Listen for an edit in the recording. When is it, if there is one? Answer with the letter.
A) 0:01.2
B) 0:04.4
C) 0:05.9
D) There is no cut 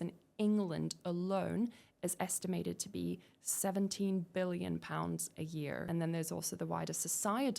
C